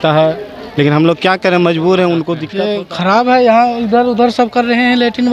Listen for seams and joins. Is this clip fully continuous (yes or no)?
no